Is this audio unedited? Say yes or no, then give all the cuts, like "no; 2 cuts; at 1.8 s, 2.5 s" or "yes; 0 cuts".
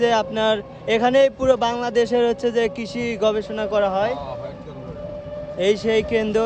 yes; 0 cuts